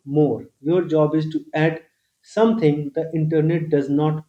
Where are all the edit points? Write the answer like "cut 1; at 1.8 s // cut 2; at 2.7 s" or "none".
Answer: none